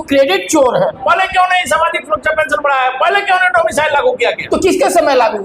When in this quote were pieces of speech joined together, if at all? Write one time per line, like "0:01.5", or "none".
0:01.0
0:04.4

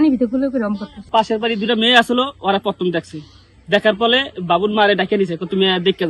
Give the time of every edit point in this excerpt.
0:00.9

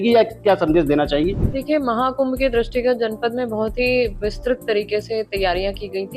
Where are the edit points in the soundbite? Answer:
0:01.5

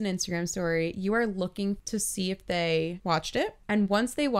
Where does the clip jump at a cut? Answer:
0:01.8
0:03.0

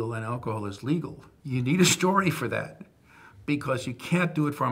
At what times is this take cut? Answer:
0:01.3

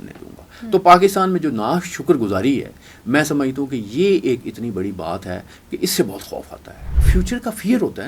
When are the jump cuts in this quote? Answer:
0:07.0

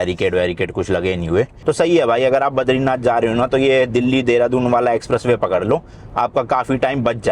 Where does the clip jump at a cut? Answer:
0:01.5

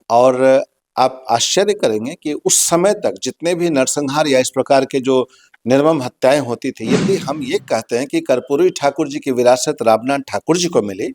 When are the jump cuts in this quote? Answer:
0:07.1

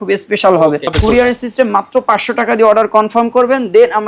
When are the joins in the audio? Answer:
0:00.9

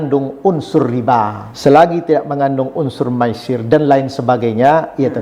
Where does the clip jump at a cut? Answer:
0:01.4

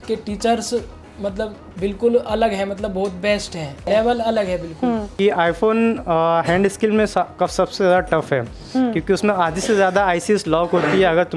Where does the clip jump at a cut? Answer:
0:01.6
0:03.8
0:05.1

